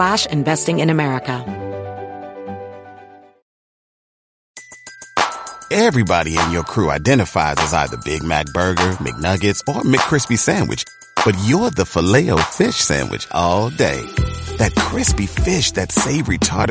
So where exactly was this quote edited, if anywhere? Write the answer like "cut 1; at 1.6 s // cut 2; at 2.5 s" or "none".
cut 1; at 1.4 s